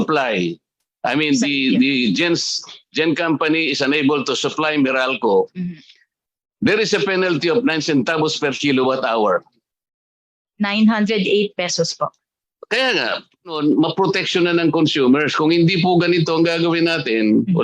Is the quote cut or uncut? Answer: cut